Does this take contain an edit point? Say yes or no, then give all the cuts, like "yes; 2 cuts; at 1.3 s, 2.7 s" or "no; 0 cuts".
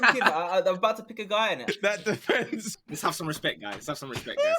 yes; 2 cuts; at 1.6 s, 2.7 s